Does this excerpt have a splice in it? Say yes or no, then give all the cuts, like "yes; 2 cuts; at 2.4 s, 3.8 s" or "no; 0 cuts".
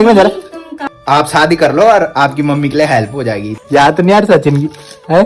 yes; 2 cuts; at 1.0 s, 3.6 s